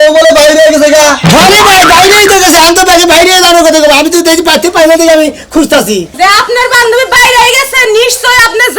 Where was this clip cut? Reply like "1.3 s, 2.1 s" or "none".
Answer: 6.0 s